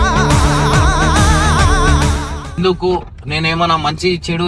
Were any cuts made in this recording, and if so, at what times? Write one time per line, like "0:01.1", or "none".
0:02.4

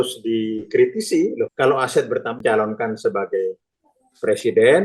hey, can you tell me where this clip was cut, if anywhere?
0:01.5
0:02.4

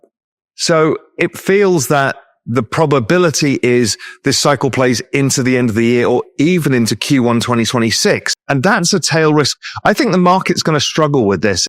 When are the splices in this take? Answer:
0:08.3

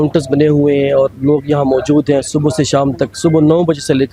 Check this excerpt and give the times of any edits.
none

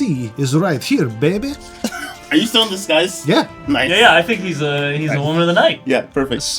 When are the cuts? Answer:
none

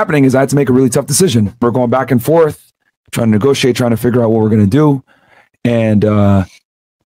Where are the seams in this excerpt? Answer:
0:01.6

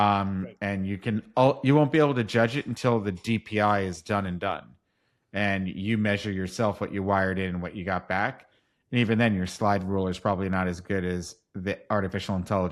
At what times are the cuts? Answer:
none

